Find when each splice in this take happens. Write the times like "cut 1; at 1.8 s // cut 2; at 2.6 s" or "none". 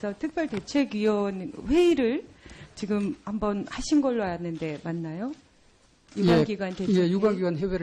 cut 1; at 5.9 s